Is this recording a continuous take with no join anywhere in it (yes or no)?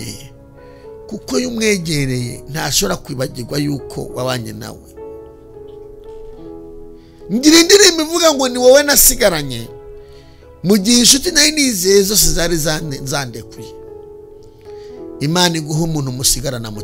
yes